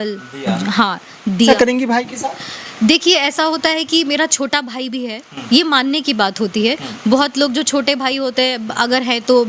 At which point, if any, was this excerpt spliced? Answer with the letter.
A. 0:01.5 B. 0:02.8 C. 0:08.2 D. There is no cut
A